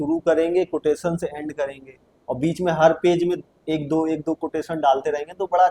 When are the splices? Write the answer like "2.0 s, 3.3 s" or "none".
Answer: none

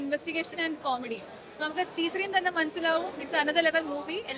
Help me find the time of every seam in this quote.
none

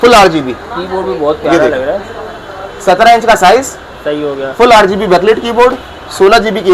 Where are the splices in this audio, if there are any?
none

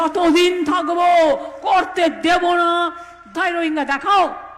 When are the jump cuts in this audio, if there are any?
3.2 s

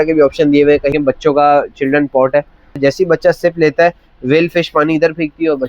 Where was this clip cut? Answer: 0.9 s, 2.8 s

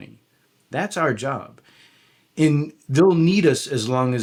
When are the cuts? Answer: none

